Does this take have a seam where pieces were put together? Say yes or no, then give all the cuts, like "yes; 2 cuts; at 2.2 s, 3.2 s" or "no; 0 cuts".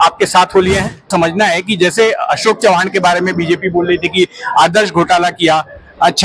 yes; 1 cut; at 1.1 s